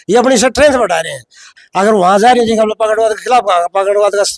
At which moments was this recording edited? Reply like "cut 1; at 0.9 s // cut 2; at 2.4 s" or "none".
cut 1; at 1.5 s